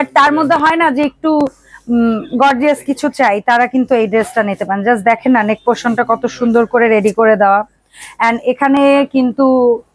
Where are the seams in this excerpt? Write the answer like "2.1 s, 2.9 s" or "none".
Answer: none

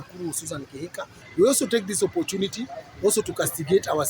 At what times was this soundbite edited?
1.2 s

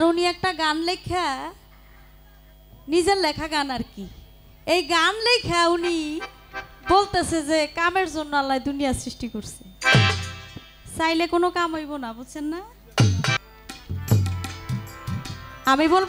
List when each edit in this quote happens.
13.4 s

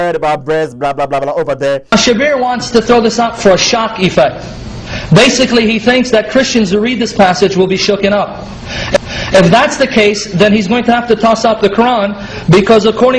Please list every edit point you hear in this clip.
1.8 s, 9.1 s

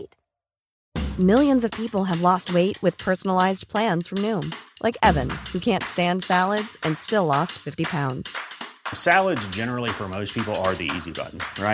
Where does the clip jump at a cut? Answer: none

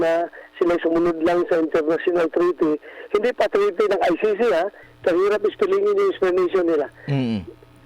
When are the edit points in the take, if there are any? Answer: 4.8 s

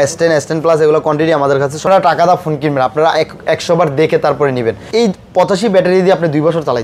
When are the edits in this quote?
1.8 s, 4.9 s

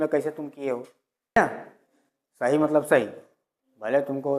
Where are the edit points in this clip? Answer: 1.4 s

